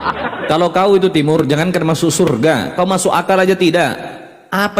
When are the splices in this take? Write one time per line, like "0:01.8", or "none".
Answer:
none